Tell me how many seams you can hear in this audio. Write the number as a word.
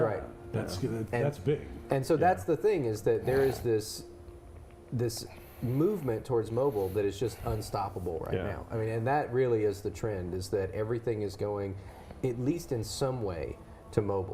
one